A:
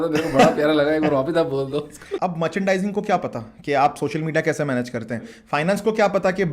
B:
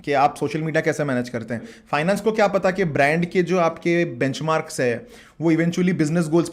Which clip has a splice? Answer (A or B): A